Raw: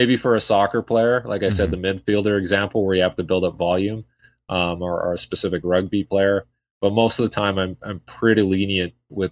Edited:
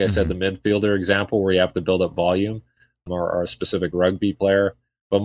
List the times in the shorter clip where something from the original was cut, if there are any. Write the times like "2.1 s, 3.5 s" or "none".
3.0 s